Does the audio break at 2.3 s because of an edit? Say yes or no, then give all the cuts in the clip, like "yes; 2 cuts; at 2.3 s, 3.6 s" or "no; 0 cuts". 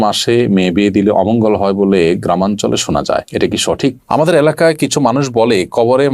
no; 1 cut; at 4.2 s